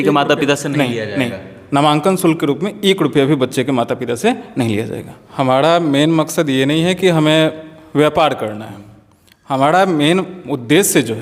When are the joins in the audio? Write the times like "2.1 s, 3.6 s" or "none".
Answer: 5.2 s